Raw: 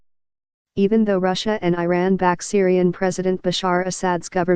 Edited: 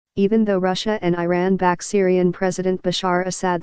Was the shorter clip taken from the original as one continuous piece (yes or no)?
yes